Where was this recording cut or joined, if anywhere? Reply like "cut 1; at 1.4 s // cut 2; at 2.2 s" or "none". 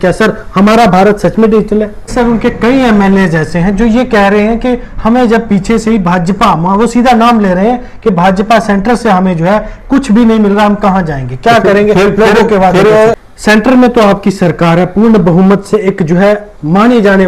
cut 1; at 2.1 s // cut 2; at 13.3 s